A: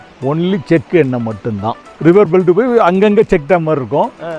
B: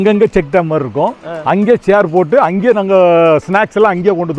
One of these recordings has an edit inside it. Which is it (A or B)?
A